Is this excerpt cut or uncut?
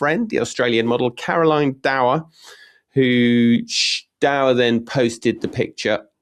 uncut